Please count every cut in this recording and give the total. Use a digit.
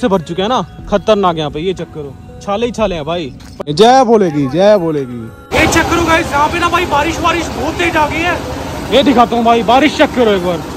2